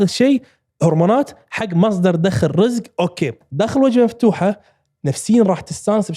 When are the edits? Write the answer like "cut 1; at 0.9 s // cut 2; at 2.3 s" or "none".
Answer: cut 1; at 3.4 s